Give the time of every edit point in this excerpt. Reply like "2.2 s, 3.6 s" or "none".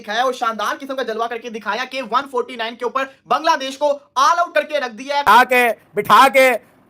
5.3 s